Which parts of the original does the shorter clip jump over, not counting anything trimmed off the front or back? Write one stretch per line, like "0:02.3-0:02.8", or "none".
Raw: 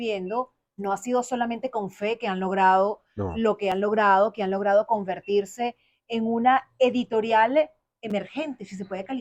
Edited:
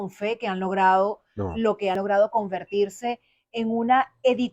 0:03.8-0:04.5